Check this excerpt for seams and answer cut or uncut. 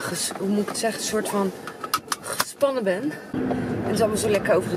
cut